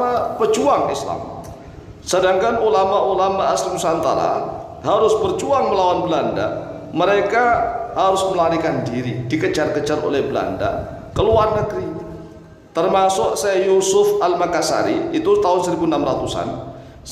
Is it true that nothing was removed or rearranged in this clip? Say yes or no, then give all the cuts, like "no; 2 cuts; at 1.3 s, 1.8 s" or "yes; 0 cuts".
yes; 0 cuts